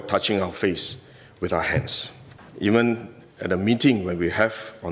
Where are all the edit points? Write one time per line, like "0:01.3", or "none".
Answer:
0:02.4